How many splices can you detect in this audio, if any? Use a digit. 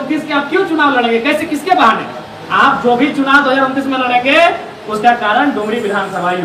0